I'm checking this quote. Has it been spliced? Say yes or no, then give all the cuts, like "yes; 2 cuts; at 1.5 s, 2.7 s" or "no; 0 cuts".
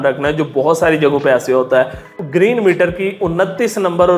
yes; 1 cut; at 2.1 s